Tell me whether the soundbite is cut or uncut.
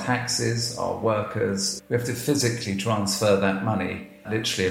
cut